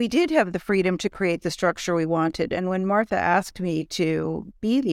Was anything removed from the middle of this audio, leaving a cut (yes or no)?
no